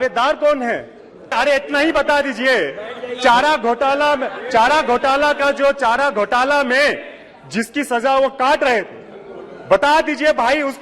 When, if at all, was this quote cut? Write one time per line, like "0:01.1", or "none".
0:01.3